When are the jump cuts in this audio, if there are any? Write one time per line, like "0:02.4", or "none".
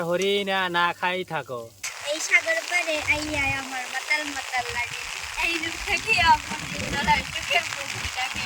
0:01.9